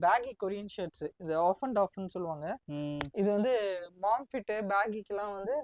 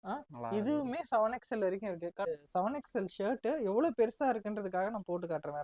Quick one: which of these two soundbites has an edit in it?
second; 1 cut; at 2.3 s

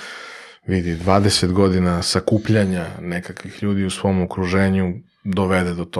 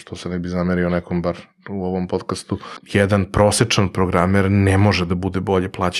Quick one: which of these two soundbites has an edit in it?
second; 1 cut; at 2.8 s

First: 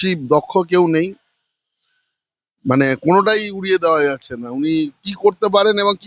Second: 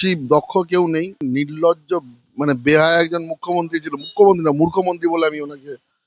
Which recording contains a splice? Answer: second; 1 cut; at 1.2 s

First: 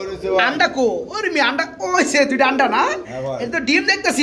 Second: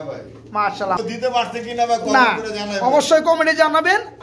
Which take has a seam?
second; 1 cut; at 1.0 s

